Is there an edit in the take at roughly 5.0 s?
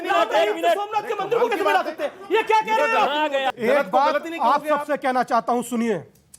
no; 1 cut; at 3.5 s

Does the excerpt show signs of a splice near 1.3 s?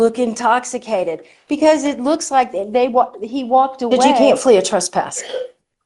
no; 1 cut; at 4.2 s

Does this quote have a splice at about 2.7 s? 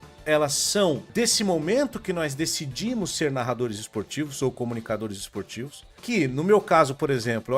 no; 2 cuts; at 1.0 s, 5.8 s

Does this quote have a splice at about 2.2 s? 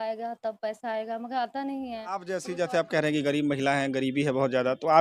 yes; 1 cut; at 2.2 s

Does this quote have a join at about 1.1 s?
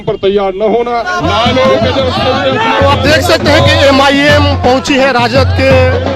yes; 1 cut; at 1.1 s

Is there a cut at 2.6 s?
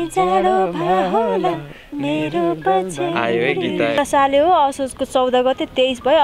no; 1 cut; at 4.0 s

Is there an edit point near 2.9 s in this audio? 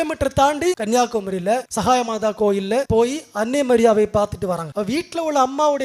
yes; 4 cuts; at 0.8 s, 1.7 s, 2.9 s, 4.7 s

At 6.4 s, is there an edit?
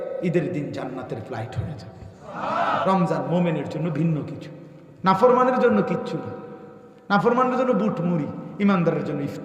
no; 1 cut; at 2.8 s

